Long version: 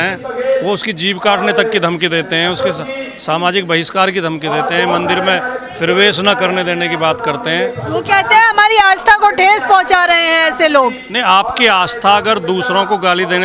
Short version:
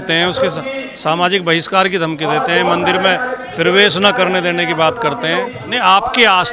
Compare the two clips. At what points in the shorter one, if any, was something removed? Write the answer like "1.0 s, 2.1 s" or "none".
5.6 s